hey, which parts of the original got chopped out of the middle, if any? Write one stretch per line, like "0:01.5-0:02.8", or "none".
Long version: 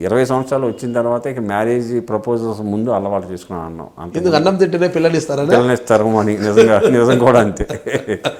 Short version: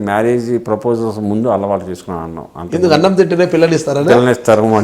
none